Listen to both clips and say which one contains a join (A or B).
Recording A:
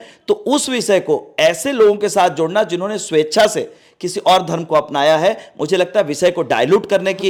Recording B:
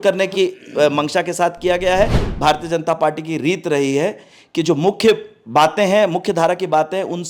B